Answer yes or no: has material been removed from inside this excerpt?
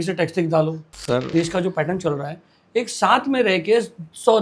yes